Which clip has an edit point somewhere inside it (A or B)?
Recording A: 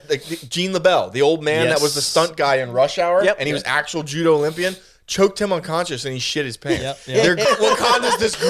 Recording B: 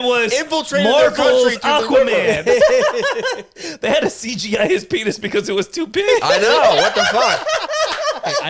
A